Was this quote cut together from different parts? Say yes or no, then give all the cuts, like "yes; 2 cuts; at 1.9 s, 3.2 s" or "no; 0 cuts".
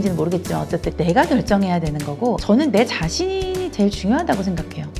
yes; 2 cuts; at 0.9 s, 2.4 s